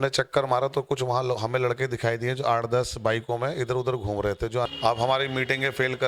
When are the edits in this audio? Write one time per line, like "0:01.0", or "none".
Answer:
0:04.7